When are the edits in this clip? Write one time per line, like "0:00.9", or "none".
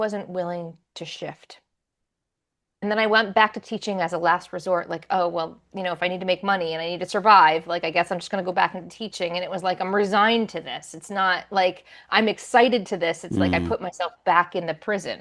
0:02.8